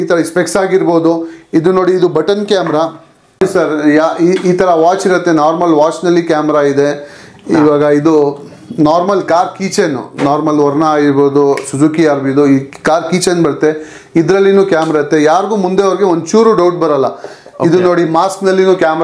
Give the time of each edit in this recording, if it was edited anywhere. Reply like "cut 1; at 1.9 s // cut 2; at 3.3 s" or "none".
cut 1; at 3.4 s